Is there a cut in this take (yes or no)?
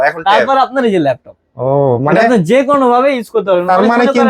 no